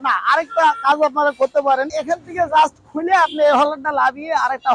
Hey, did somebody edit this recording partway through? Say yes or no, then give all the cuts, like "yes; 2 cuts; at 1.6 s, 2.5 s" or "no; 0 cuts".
yes; 1 cut; at 1.9 s